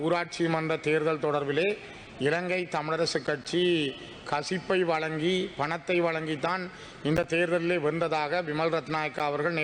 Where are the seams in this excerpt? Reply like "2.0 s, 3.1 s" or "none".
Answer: none